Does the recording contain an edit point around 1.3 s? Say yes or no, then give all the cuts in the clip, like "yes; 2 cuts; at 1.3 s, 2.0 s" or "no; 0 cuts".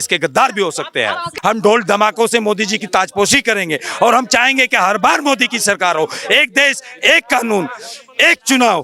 yes; 1 cut; at 1.3 s